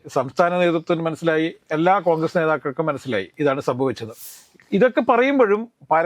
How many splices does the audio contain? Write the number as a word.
one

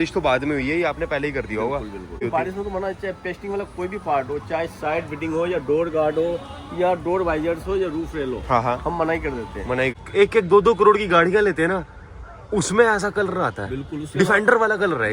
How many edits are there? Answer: two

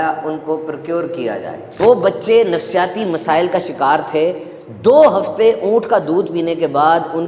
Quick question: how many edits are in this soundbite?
one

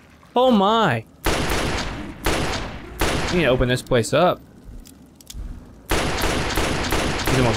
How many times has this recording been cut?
zero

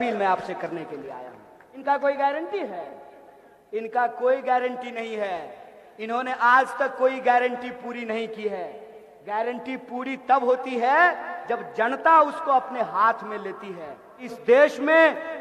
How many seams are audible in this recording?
two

